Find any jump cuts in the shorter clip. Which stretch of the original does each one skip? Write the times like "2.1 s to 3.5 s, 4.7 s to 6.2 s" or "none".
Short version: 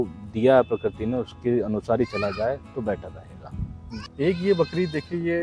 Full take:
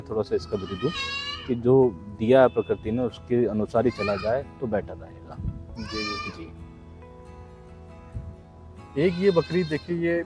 5.9 s to 8.8 s